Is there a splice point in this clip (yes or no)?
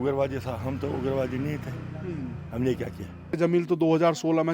yes